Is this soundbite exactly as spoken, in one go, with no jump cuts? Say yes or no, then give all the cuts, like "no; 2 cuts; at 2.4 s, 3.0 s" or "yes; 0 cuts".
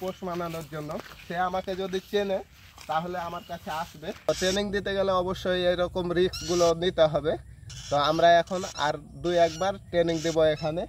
no; 1 cut; at 4.3 s